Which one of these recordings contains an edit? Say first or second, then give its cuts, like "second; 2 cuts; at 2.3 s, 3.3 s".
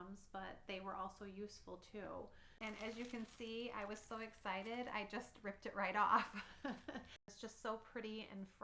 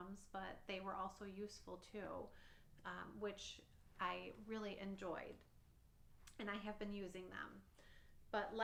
first; 2 cuts; at 2.6 s, 7.3 s